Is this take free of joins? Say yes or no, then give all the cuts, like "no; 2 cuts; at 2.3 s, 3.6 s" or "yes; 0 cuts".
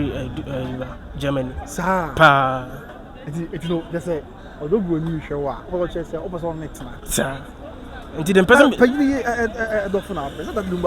yes; 0 cuts